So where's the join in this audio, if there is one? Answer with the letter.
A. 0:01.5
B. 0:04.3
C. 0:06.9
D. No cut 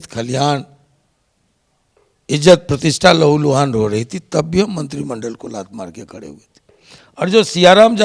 D